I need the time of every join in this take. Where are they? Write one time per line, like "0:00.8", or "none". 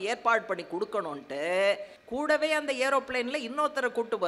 0:02.0